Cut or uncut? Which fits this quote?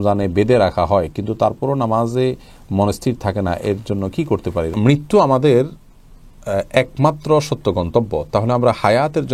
cut